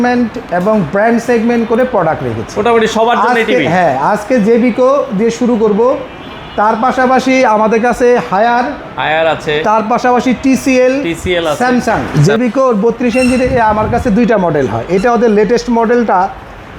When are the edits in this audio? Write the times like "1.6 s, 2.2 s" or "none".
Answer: 12.1 s